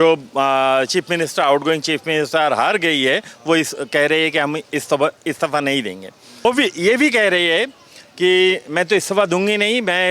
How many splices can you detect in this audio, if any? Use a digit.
1